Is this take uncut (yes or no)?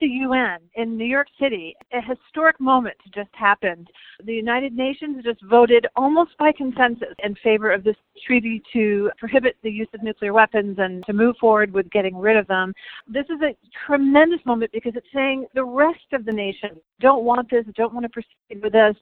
no